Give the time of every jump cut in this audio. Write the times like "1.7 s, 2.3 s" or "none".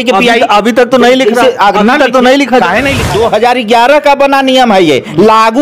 3.0 s